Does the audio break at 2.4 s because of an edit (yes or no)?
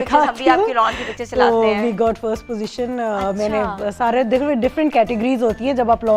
no